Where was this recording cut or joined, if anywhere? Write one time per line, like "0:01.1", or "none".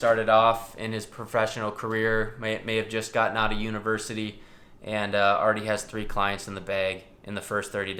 none

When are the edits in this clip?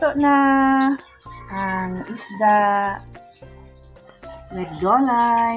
0:03.1
0:04.4

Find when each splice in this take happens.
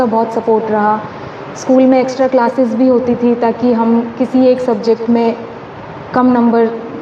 none

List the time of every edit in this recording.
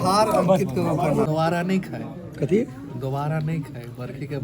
0:01.3

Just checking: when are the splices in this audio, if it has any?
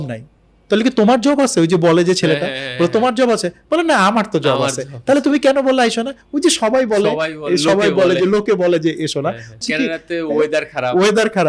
0:09.6

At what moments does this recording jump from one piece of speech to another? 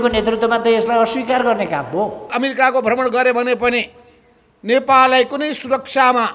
0:02.3

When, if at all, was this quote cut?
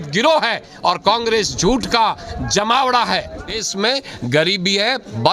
0:03.6

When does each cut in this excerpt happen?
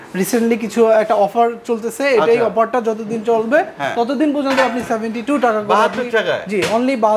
none

